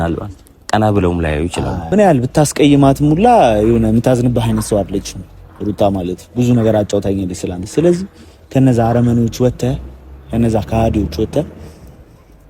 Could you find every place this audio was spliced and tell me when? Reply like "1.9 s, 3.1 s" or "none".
1.8 s